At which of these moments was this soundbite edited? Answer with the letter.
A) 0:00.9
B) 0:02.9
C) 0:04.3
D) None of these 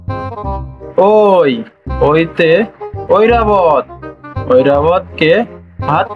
A